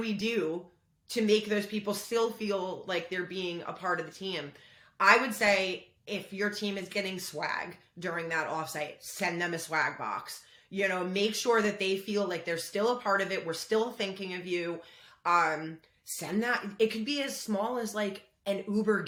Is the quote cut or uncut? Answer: uncut